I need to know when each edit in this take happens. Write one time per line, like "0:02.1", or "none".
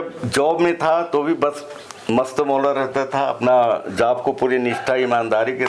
none